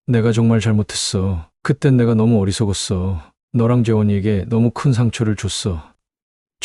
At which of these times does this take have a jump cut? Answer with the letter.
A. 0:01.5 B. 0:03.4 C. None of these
C